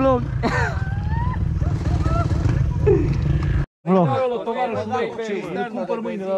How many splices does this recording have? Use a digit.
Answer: 1